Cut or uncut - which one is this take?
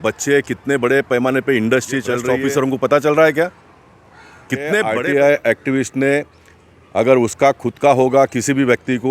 cut